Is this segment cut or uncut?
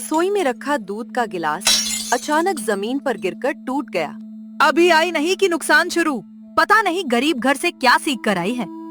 uncut